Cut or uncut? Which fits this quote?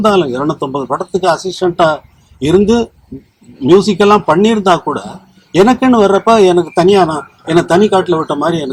uncut